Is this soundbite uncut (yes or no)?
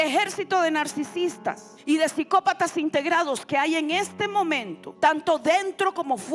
no